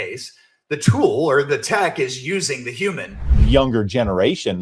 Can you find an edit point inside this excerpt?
yes; 1 cut; at 3.3 s

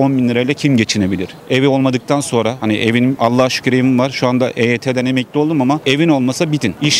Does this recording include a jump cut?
no; 0 cuts

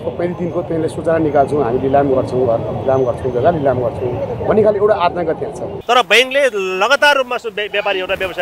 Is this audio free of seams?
no; 1 cut; at 5.7 s

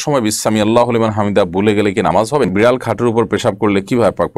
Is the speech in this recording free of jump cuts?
no; 1 cut; at 2.5 s

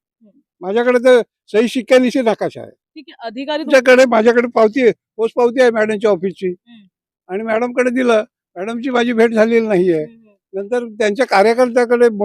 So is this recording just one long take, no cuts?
no; 1 cut; at 3.7 s

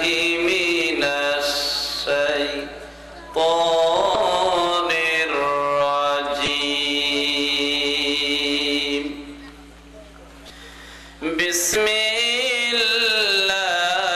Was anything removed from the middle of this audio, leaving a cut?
yes; 4 cuts; at 4.1 s, 6.5 s, 10.5 s, 11.8 s

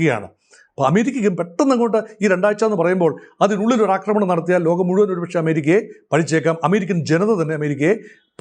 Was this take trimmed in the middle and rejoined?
no; 0 cuts

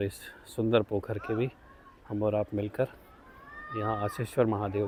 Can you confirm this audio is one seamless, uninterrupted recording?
yes; 0 cuts

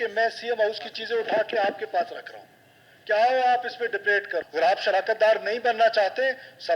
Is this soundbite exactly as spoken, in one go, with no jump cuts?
no; 1 cut; at 4.4 s

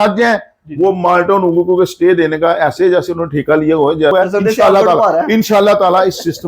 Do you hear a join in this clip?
yes; 1 cut; at 4.1 s

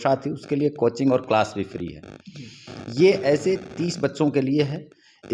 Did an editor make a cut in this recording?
no; 0 cuts

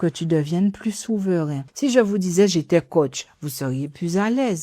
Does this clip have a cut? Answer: yes; 1 cut; at 1.6 s

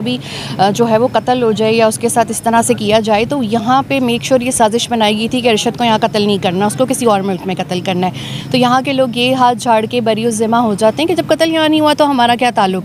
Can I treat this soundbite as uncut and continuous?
yes; 0 cuts

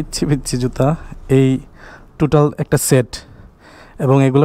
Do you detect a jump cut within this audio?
no; 0 cuts

